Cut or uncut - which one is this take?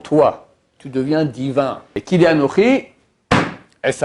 cut